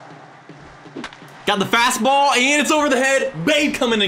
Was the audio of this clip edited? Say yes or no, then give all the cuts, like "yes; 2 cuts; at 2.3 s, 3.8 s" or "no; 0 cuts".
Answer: no; 0 cuts